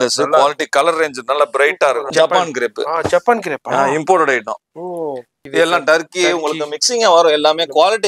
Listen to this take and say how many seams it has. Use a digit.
2